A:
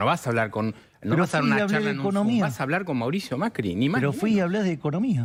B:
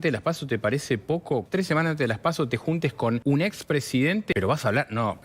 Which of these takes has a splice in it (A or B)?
B